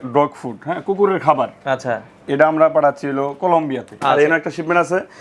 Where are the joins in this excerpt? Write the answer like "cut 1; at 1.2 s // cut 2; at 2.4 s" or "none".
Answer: cut 1; at 3.9 s